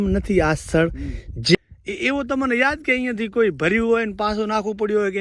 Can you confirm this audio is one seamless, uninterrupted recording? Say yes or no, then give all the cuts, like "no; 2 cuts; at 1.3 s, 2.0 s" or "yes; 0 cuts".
no; 1 cut; at 1.6 s